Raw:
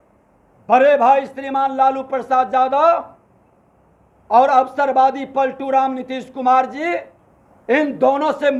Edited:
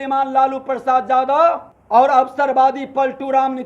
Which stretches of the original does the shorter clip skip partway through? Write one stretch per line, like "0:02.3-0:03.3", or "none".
0:03.2-0:04.1

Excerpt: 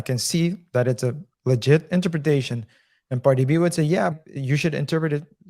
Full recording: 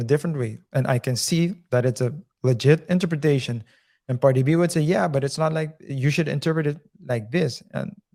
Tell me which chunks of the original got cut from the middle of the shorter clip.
0:05.1-0:05.7

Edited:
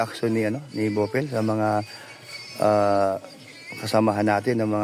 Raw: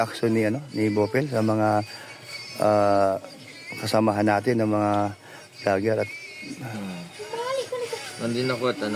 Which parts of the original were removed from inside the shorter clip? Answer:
none

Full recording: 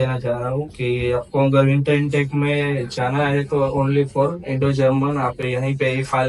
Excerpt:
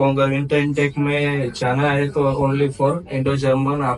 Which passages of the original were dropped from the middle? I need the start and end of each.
none

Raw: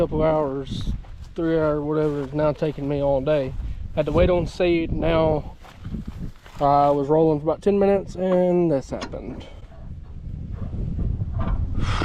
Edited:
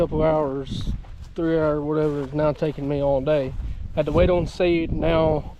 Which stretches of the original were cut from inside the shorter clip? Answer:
none

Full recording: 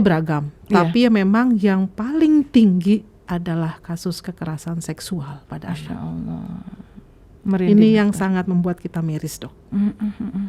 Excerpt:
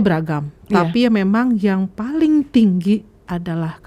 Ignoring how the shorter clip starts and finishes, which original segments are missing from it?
none

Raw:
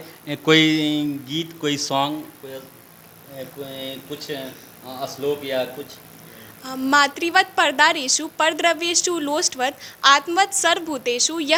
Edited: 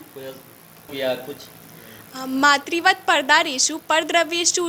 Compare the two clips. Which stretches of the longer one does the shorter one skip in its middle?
0:03.2-0:05.4

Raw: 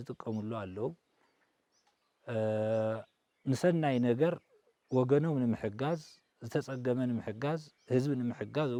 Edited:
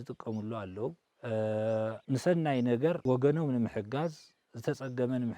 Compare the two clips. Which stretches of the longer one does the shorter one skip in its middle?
0:01.1-0:02.1
0:03.0-0:03.4
0:04.4-0:04.9

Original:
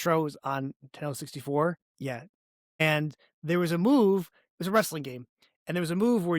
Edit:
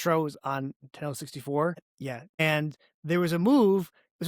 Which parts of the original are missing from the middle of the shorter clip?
0:01.9-0:02.3

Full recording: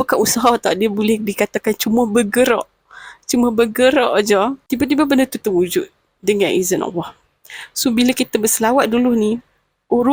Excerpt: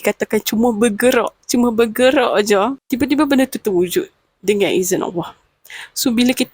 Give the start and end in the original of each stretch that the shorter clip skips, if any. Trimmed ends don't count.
0:02.7-0:03.2

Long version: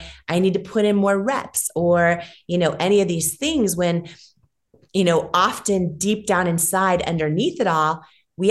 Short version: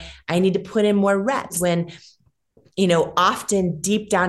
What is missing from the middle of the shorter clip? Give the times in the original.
0:01.6-0:03.7

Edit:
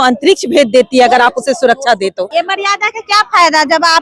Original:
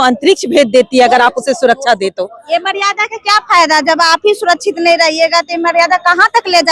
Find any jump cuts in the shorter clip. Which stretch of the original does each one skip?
0:02.3-0:02.5

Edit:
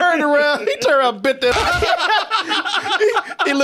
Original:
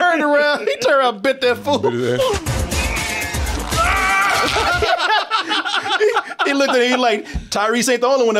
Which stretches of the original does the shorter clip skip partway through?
0:01.5-0:04.5

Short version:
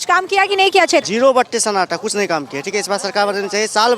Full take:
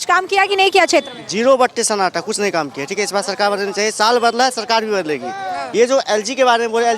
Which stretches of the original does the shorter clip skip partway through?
0:01.1-0:01.3

